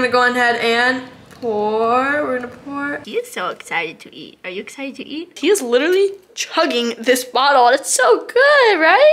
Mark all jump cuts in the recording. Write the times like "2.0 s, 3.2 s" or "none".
3.0 s, 5.4 s